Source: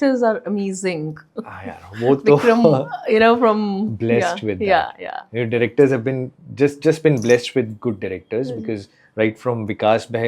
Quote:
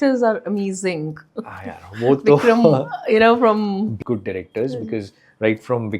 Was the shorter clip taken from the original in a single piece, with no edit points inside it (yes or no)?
no